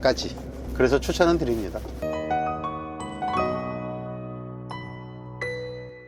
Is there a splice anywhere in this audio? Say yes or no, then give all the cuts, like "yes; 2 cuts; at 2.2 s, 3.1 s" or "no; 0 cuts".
yes; 1 cut; at 1.9 s